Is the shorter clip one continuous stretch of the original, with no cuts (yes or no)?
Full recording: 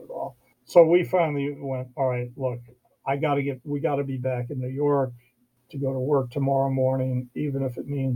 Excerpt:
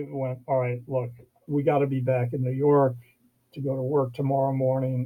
no